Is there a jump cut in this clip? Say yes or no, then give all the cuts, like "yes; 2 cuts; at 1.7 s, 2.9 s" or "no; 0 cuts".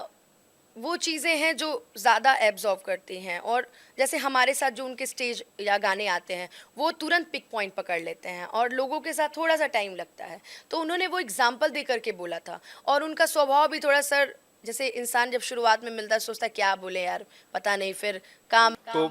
yes; 2 cuts; at 1.0 s, 8.9 s